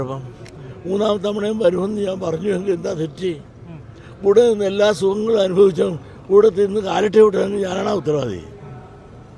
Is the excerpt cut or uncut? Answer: uncut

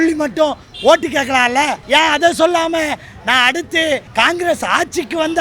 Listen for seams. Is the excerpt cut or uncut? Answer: cut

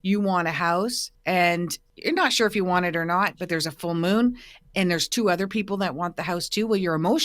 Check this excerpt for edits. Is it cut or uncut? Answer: cut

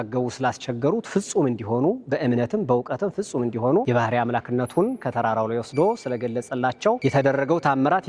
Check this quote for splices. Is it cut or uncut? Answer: uncut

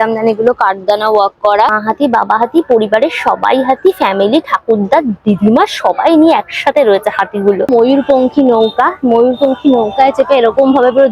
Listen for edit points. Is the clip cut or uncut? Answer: cut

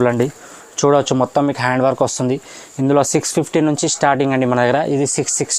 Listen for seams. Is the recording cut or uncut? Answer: uncut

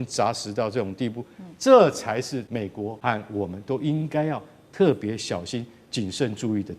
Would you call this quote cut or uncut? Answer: cut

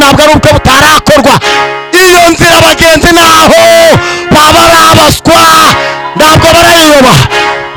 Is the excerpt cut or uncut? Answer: uncut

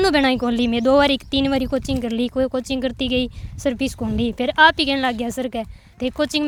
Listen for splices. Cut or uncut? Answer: uncut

